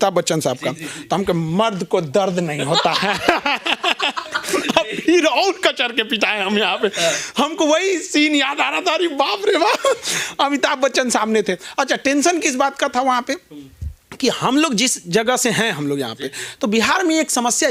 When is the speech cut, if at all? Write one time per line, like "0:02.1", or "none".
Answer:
none